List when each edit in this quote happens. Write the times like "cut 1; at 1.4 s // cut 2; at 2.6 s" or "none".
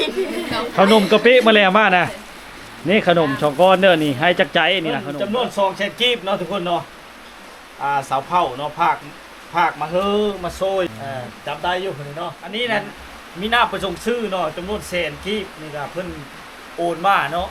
cut 1; at 5.0 s // cut 2; at 10.9 s // cut 3; at 12.4 s